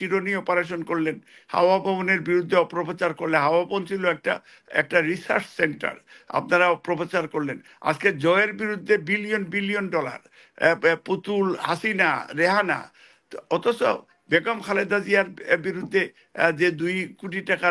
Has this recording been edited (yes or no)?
no